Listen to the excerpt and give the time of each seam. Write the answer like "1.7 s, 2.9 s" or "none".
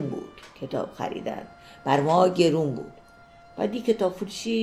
none